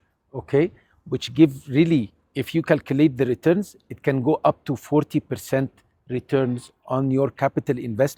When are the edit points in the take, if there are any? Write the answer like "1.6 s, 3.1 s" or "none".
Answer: none